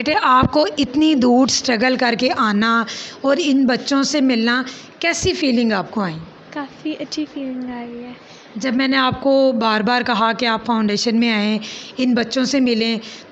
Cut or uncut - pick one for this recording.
uncut